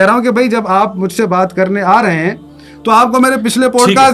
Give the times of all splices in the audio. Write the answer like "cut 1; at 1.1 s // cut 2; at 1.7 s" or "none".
none